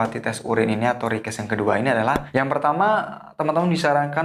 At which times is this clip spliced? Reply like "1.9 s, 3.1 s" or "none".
2.2 s